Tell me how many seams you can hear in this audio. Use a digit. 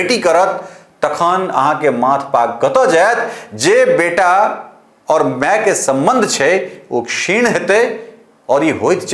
0